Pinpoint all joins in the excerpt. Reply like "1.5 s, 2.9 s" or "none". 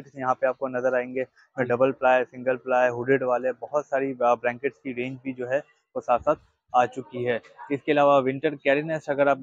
none